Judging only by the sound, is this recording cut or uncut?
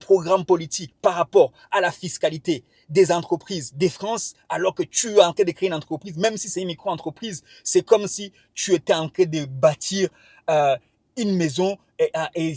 uncut